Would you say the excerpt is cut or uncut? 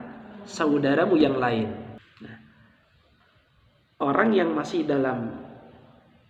cut